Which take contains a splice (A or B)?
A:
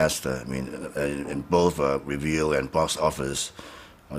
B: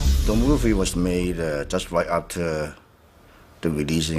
A